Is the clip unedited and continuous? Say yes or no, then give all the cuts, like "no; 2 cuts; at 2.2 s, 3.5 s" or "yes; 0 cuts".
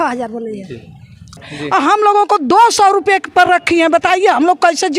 no; 1 cut; at 1.4 s